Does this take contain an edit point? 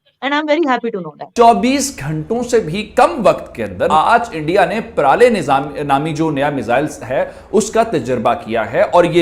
yes; 2 cuts; at 1.3 s, 3.9 s

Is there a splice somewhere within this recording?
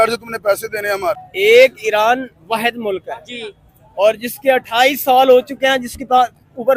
yes; 1 cut; at 1.3 s

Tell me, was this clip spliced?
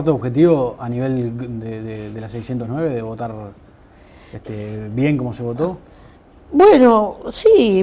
no; 0 cuts

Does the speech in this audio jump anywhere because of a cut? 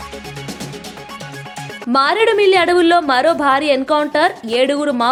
no; 0 cuts

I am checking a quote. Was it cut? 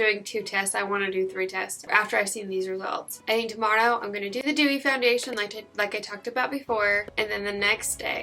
no; 0 cuts

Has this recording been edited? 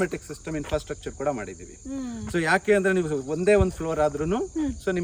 no; 0 cuts

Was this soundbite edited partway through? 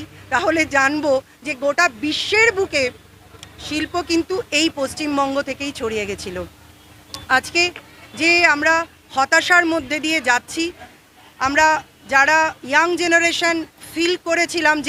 no; 0 cuts

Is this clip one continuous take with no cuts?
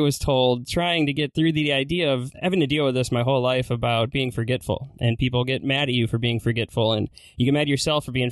no; 2 cuts; at 1.3 s, 2.3 s

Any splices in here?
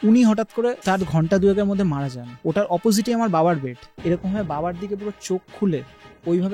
yes; 2 cuts; at 0.8 s, 2.3 s

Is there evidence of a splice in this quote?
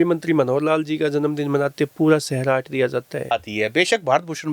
yes; 1 cut; at 3.3 s

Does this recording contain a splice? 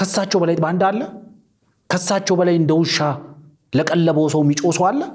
no; 0 cuts

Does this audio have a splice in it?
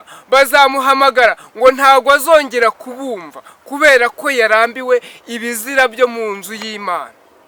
no; 0 cuts

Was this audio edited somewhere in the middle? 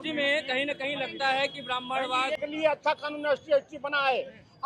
yes; 1 cut; at 2.4 s

